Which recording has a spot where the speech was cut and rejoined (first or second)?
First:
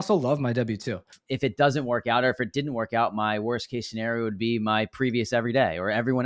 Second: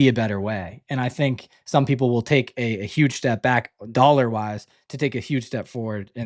first